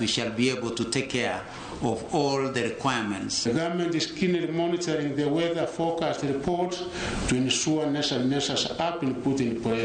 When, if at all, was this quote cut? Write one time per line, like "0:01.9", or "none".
0:03.4